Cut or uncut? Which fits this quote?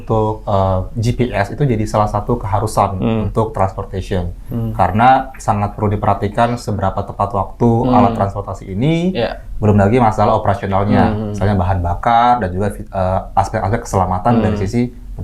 uncut